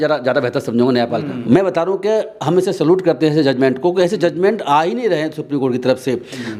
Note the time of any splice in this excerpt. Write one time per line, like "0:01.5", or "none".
0:01.3

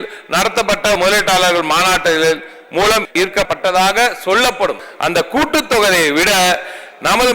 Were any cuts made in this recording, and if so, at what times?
0:01.0
0:03.1
0:04.8

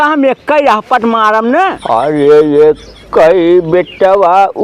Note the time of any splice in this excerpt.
0:01.8

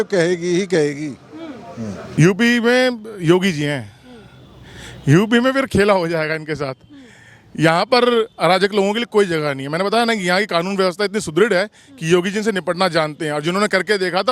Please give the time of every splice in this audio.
0:02.1

